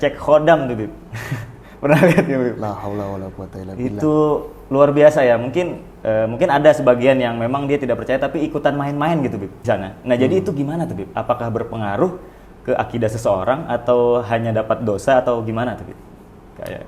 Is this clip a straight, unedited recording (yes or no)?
no